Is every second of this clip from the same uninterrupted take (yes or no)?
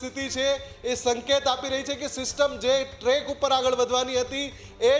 yes